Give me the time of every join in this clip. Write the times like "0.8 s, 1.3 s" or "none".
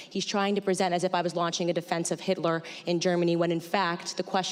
none